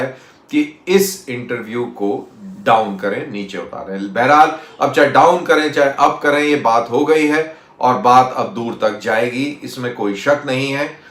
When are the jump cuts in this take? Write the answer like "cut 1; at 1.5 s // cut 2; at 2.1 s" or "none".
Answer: none

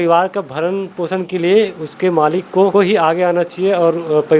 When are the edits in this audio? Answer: cut 1; at 2.7 s

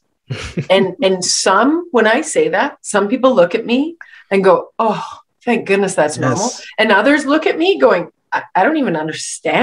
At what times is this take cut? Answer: none

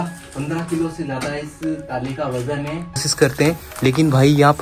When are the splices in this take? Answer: cut 1; at 3.1 s

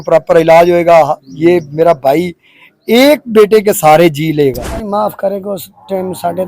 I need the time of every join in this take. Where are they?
cut 1; at 4.8 s

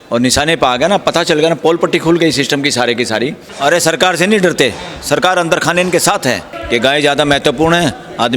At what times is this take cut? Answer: cut 1; at 3.4 s // cut 2; at 6.5 s

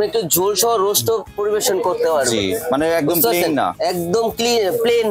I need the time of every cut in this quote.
none

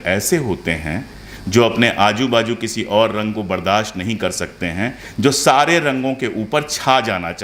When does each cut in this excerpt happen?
none

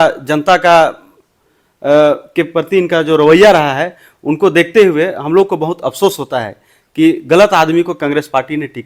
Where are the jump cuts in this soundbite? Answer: none

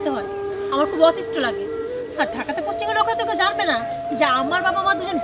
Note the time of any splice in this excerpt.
none

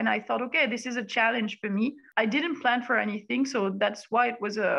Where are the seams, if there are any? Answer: cut 1; at 2.0 s

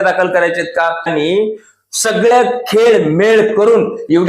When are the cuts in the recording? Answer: cut 1; at 1.1 s

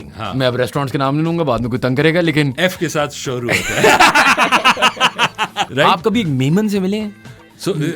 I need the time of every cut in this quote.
cut 1; at 5.6 s

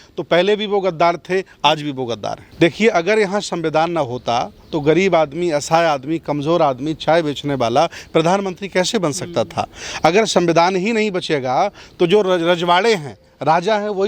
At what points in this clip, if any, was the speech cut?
cut 1; at 2.4 s

